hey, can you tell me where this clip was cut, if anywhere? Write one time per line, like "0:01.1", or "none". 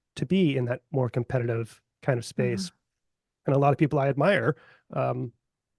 none